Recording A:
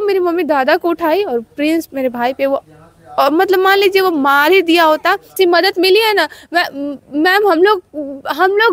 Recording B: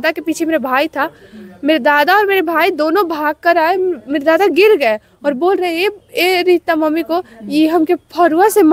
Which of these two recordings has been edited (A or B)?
A